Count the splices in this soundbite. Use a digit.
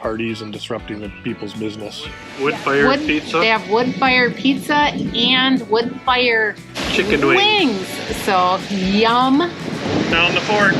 2